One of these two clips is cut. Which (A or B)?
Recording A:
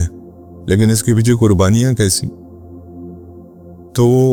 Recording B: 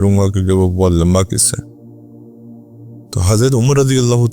B